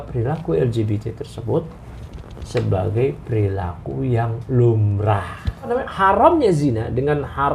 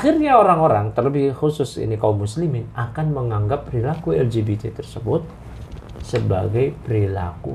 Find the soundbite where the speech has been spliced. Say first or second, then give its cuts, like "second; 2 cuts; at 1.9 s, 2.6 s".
first; 1 cut; at 5.7 s